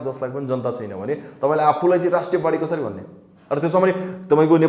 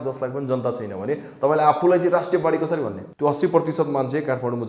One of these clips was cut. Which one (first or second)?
second